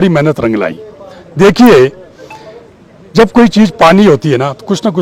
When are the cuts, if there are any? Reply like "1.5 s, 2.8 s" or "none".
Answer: none